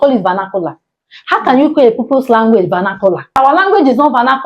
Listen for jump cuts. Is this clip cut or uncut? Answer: cut